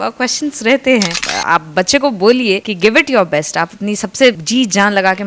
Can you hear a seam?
yes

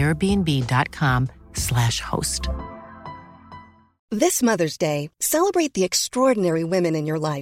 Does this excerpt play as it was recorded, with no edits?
no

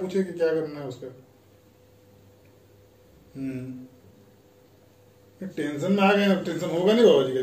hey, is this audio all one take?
yes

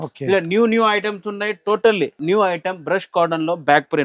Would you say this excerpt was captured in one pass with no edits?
no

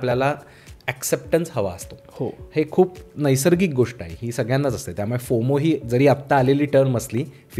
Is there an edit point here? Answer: no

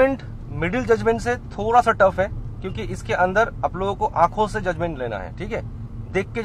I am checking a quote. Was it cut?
no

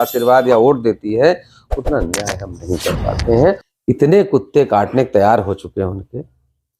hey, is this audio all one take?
no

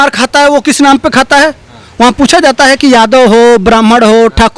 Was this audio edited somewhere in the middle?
no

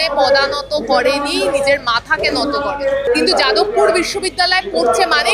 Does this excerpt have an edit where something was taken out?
yes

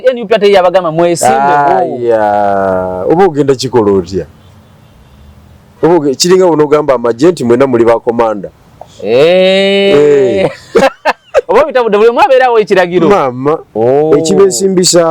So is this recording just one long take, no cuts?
no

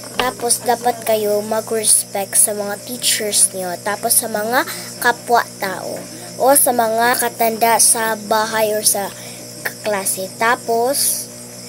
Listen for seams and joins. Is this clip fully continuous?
no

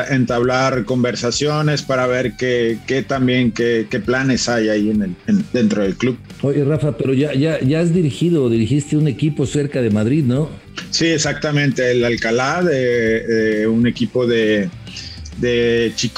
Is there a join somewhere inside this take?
no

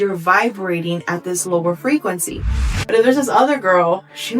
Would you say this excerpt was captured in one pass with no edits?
no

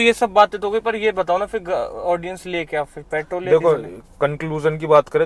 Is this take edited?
no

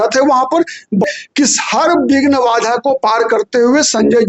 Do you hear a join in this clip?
yes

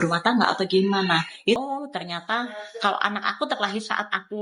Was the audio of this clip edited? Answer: yes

